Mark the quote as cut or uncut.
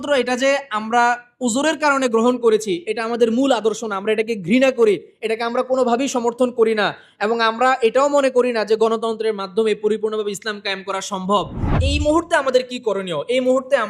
cut